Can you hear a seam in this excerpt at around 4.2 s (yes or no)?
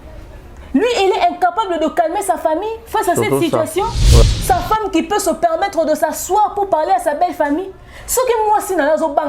yes